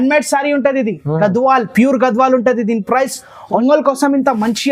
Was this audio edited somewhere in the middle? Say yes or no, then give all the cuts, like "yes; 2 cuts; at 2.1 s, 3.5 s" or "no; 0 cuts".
yes; 1 cut; at 3.6 s